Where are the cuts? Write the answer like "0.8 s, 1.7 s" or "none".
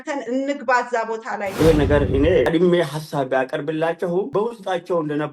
1.5 s, 2.5 s, 4.3 s